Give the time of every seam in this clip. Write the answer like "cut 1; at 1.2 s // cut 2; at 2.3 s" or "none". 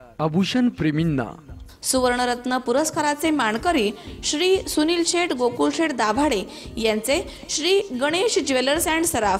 none